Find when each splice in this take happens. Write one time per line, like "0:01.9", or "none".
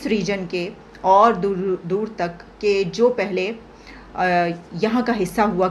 none